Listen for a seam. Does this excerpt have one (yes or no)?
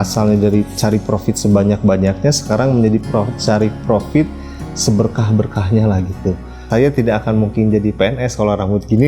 yes